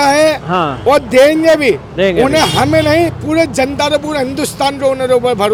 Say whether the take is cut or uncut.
uncut